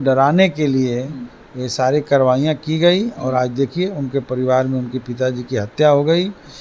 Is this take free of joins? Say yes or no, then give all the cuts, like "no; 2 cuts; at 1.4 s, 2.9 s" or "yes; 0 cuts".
yes; 0 cuts